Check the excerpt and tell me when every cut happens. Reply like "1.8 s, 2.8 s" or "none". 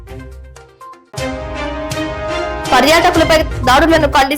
1.0 s, 2.7 s